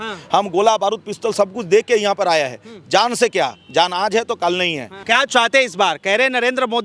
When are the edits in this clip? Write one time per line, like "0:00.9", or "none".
0:04.9